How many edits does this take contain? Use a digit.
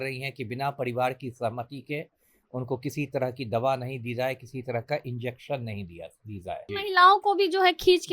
1